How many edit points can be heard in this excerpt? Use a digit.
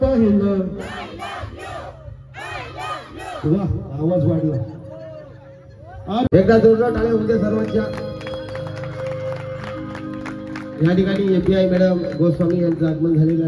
1